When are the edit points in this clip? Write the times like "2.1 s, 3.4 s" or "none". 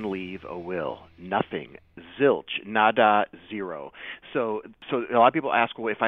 4.8 s